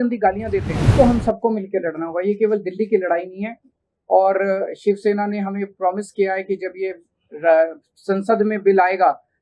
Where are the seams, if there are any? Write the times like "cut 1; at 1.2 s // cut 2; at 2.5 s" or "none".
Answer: cut 1; at 0.9 s